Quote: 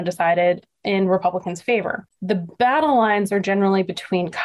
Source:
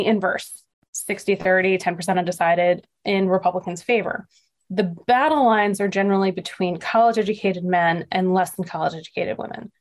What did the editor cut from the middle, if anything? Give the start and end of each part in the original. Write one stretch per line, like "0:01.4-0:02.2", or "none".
0:04.3-0:04.5